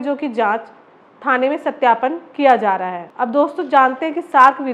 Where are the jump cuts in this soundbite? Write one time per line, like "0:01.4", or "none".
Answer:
none